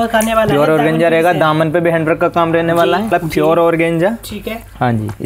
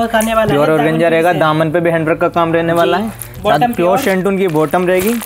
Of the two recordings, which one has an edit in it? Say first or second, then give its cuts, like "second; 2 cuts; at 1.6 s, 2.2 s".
first; 1 cut; at 3.1 s